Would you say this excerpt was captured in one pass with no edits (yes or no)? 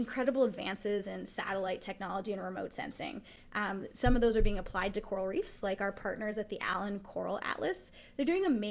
yes